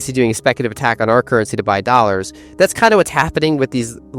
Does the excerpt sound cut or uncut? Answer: uncut